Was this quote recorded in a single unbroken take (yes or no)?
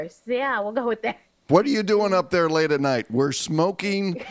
no